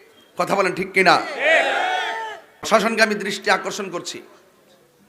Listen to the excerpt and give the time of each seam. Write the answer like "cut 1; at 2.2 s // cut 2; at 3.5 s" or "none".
cut 1; at 2.7 s